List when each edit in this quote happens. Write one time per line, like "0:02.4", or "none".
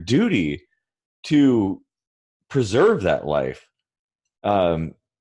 none